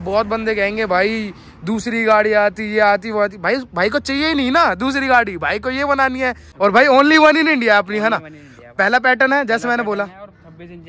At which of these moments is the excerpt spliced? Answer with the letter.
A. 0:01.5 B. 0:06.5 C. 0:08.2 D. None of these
B